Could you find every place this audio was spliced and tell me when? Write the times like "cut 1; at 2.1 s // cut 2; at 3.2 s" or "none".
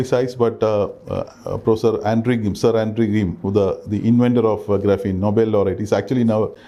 none